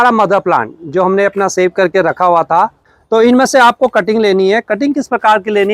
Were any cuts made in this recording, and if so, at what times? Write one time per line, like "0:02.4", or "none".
none